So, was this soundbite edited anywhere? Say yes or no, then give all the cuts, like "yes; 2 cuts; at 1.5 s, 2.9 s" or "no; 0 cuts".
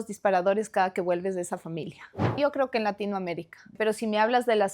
yes; 2 cuts; at 2.4 s, 3.8 s